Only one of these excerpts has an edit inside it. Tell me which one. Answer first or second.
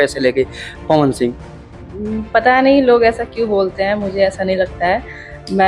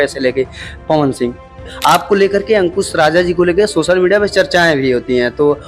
second